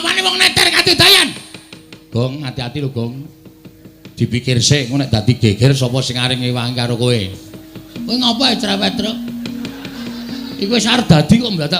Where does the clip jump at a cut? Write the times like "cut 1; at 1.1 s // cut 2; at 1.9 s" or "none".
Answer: cut 1; at 5.3 s